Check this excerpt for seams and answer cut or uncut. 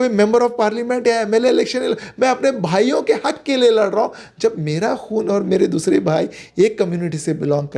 uncut